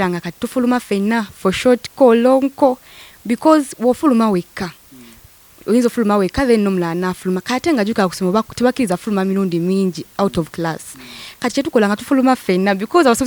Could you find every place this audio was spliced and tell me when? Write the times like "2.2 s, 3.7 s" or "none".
none